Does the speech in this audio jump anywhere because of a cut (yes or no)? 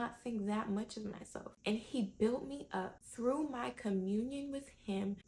no